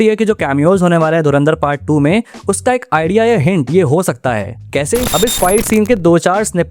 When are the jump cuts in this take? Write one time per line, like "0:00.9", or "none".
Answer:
0:05.1